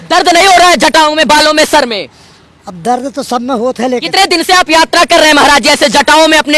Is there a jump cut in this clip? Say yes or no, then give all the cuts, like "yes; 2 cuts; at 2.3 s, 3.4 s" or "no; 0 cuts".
yes; 1 cut; at 4.1 s